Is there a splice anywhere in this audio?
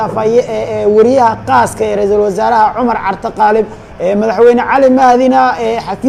no; 0 cuts

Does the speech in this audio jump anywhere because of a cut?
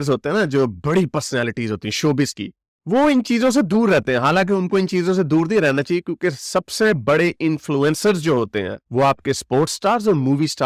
no; 0 cuts

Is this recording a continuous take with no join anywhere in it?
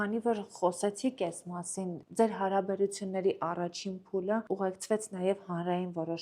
no; 1 cut; at 4.4 s

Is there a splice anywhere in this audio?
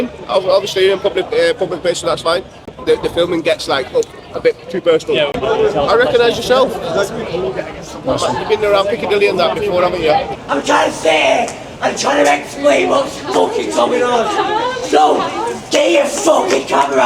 yes; 3 cuts; at 2.6 s, 5.3 s, 10.3 s

